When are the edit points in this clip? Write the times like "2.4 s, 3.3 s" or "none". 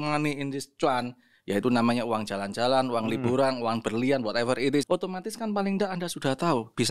4.9 s